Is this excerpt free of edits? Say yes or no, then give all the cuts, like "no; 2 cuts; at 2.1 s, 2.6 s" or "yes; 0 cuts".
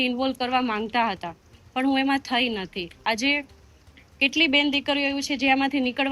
yes; 0 cuts